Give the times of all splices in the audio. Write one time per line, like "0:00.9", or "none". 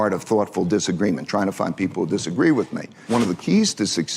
0:03.0